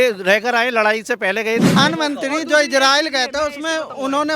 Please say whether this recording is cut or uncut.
cut